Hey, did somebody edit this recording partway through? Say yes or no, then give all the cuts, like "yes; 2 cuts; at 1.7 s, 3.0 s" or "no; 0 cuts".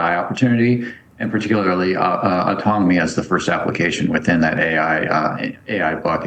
no; 0 cuts